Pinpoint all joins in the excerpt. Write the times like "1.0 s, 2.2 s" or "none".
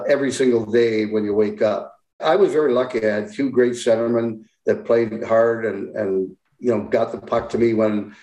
2.2 s